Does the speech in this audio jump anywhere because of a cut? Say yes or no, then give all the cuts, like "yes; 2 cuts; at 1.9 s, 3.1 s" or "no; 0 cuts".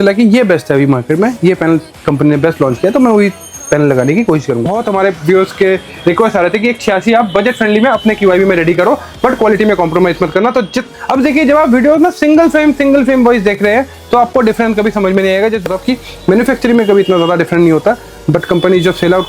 yes; 3 cuts; at 4.7 s, 10.8 s, 15.6 s